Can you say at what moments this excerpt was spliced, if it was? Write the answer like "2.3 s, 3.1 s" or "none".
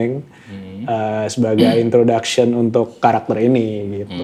none

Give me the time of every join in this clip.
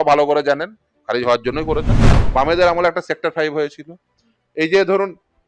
2.2 s

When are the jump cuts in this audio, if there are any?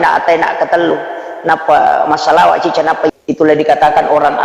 3.1 s

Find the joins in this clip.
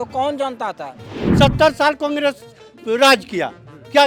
1.2 s

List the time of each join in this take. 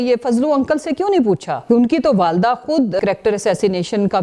1.5 s, 3.0 s

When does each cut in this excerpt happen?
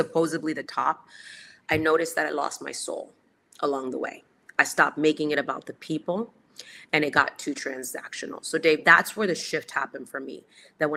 none

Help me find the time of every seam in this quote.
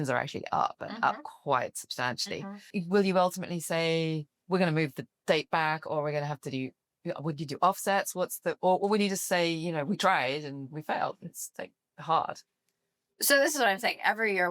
2.6 s

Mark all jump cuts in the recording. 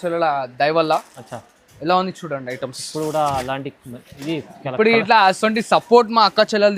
none

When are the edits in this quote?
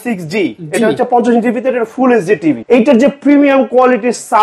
2.6 s

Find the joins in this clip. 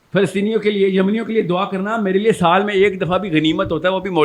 none

